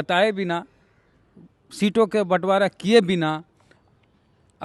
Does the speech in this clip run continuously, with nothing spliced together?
yes; 0 cuts

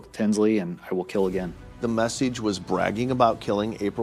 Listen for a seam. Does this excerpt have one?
yes; 1 cut; at 1.8 s

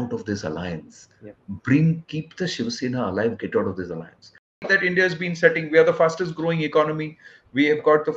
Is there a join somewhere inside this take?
yes; 1 cut; at 4.6 s

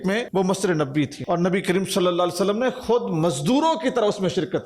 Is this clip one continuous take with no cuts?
no; 1 cut; at 1.2 s

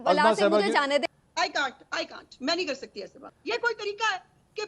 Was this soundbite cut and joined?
yes; 2 cuts; at 1.1 s, 3.2 s

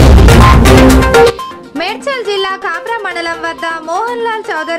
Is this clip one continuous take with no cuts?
yes; 0 cuts

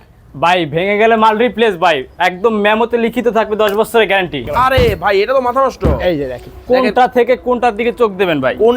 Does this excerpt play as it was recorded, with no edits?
no; 1 cut; at 4.4 s

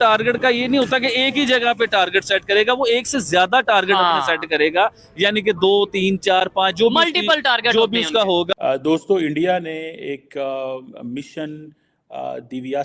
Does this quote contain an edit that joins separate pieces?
yes; 1 cut; at 8.5 s

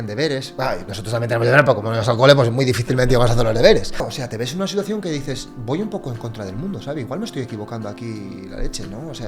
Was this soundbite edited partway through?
yes; 1 cut; at 4.0 s

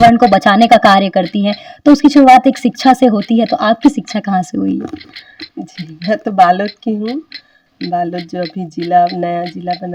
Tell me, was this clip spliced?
no; 0 cuts

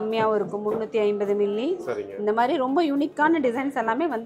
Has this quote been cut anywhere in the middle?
no; 0 cuts

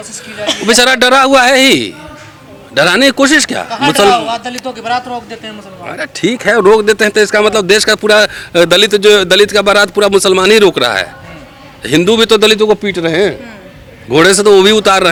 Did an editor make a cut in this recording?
no; 0 cuts

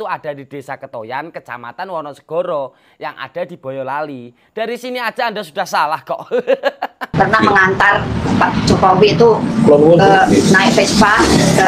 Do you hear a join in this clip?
yes; 1 cut; at 7.0 s

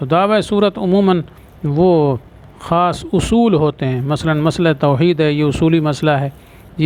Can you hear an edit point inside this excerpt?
no; 0 cuts

